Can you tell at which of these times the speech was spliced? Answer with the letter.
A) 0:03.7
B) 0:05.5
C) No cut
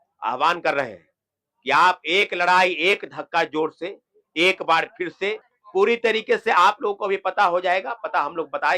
B